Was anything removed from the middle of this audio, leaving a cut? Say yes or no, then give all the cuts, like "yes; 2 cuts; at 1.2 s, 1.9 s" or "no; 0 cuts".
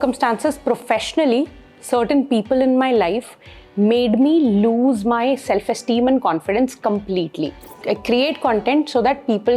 yes; 1 cut; at 7.8 s